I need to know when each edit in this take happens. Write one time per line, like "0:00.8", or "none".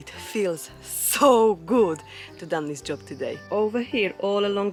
none